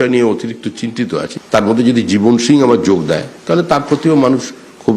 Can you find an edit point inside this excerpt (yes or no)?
no